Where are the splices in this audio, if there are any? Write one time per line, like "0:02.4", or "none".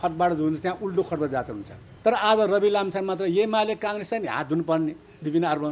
0:01.9